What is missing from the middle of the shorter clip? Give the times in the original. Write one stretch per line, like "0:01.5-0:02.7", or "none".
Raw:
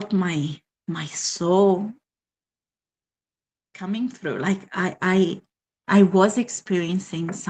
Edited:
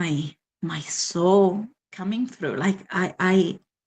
0:02.1-0:03.7